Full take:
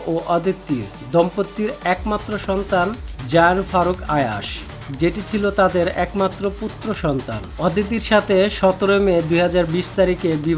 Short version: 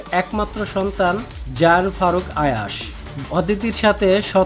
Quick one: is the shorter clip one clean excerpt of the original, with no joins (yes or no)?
no